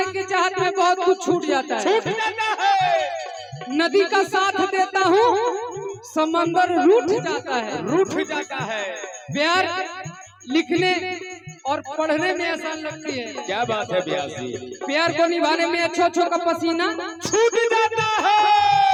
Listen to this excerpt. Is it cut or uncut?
uncut